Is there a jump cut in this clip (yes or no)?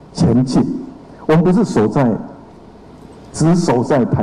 no